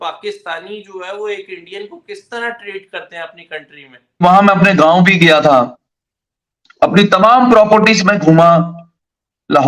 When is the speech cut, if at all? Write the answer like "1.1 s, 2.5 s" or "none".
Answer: 4.2 s

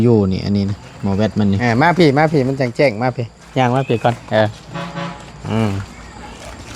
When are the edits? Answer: 1.6 s

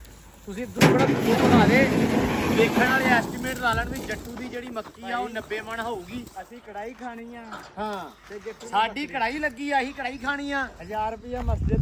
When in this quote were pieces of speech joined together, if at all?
none

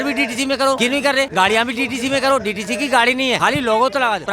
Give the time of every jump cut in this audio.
1.1 s, 3.4 s

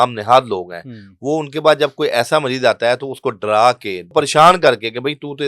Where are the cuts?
4.0 s

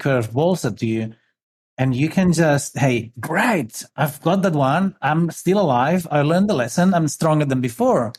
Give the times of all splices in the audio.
none

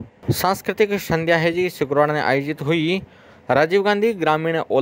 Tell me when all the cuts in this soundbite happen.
none

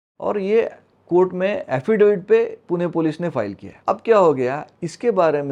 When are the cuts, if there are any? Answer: 3.7 s

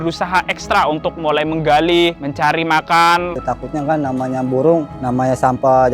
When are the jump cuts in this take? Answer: 3.3 s

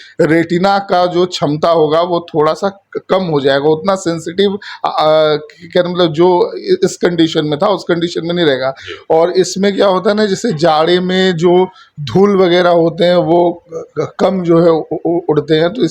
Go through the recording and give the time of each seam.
8.9 s

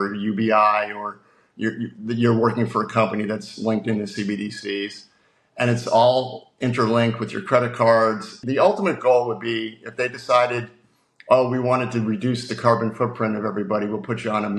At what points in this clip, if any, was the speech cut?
8.4 s

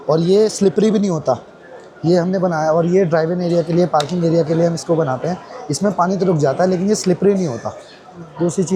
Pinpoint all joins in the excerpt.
none

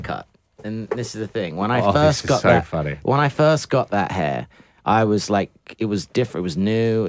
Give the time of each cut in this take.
none

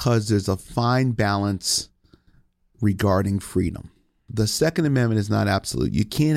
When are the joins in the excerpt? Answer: 4.3 s

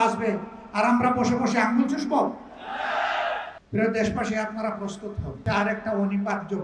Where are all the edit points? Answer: 3.6 s, 5.4 s

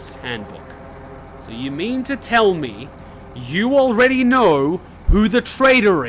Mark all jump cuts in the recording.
1.2 s

